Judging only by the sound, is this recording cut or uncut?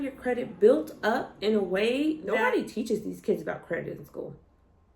cut